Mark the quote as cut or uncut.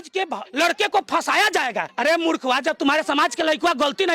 uncut